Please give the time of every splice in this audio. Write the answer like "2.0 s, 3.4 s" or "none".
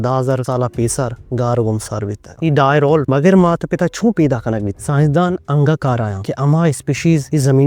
2.2 s, 4.7 s

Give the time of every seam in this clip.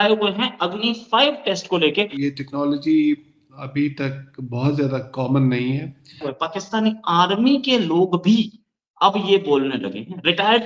2.1 s, 6.3 s

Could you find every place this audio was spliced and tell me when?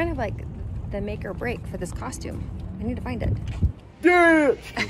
3.8 s

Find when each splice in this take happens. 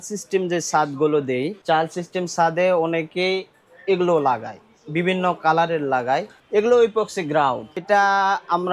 1.6 s, 6.4 s, 7.8 s

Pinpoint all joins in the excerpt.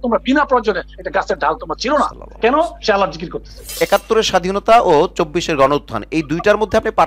3.8 s

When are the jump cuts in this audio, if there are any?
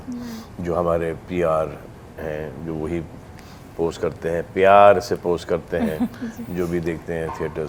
none

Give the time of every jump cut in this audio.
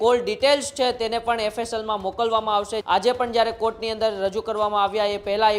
2.8 s

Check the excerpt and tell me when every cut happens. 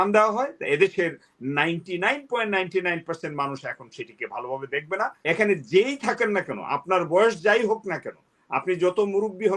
5.2 s

